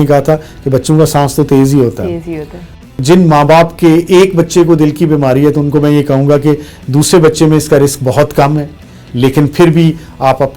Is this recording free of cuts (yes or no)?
no